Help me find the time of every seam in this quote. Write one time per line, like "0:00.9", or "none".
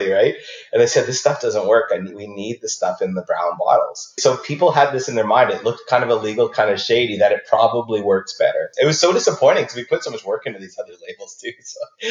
0:04.2
0:08.7